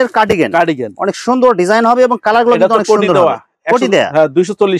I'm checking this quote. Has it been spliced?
no; 0 cuts

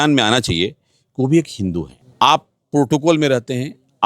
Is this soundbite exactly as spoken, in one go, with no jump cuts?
no; 1 cut; at 2.0 s

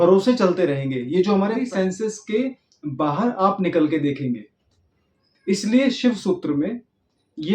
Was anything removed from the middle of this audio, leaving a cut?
yes; 1 cut; at 1.6 s

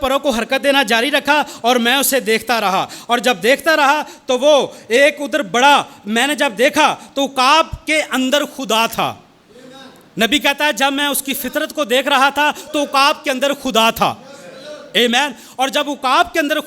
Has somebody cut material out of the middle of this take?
no; 0 cuts

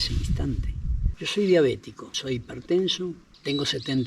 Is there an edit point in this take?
yes; 1 cut; at 1.0 s

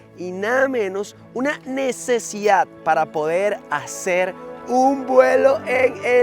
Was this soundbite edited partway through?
no; 0 cuts

